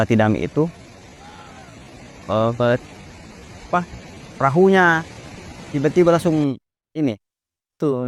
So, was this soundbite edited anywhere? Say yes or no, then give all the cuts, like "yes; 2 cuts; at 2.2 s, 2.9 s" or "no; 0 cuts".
no; 0 cuts